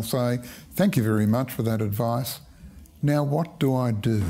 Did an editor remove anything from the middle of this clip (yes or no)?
no